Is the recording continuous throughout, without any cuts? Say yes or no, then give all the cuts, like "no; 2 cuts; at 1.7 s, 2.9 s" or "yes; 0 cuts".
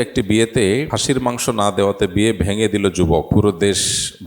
no; 2 cuts; at 0.9 s, 3.3 s